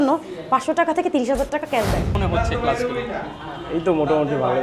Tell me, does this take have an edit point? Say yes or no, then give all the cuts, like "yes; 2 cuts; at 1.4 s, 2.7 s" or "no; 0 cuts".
yes; 1 cut; at 2.2 s